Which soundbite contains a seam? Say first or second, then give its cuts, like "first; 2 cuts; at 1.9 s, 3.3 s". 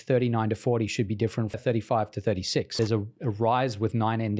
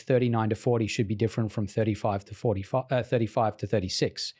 first; 2 cuts; at 1.6 s, 2.7 s